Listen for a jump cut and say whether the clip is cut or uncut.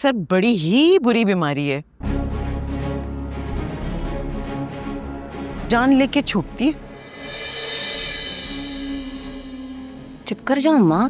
cut